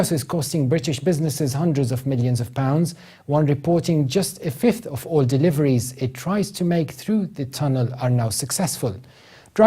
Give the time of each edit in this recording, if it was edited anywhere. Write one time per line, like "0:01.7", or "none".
0:05.2